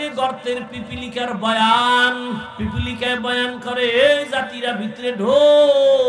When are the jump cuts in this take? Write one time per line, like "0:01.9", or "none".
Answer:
0:02.5